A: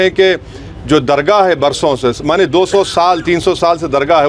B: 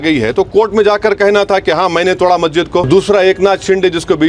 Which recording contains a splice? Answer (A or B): B